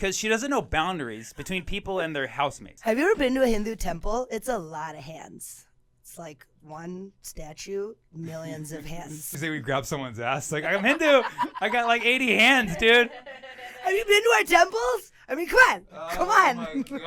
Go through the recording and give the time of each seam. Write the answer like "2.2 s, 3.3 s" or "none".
2.7 s, 9.3 s